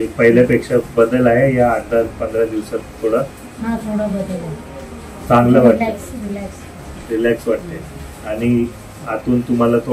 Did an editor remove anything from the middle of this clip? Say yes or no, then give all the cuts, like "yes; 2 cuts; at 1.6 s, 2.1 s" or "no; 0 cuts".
yes; 1 cut; at 3.3 s